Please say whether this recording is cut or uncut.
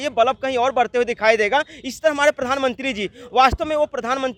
uncut